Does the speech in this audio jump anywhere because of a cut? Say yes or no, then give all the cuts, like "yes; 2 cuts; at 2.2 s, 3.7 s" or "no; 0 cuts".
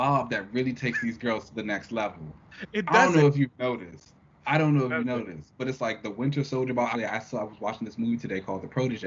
yes; 1 cut; at 6.9 s